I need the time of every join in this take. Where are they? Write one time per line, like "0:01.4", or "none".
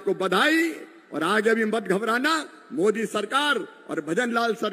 none